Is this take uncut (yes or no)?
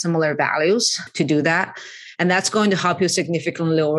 no